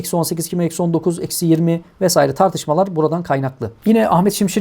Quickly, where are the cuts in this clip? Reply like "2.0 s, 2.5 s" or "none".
3.7 s